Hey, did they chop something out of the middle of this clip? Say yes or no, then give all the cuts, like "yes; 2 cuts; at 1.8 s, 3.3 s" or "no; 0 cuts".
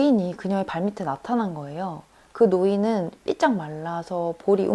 no; 0 cuts